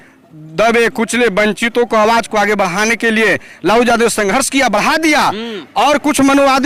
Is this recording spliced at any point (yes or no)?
no